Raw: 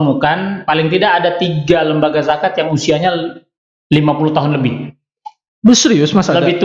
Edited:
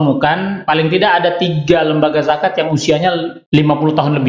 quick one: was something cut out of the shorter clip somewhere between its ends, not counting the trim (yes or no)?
yes